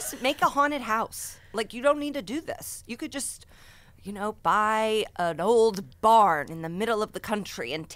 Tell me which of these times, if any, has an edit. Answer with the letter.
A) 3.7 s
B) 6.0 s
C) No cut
C